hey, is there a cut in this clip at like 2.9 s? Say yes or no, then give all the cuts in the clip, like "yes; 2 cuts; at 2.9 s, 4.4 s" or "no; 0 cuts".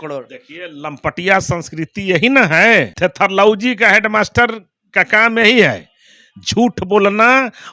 yes; 1 cut; at 2.9 s